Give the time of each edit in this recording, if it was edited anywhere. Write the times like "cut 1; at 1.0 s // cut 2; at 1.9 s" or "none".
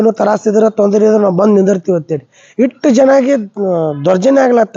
none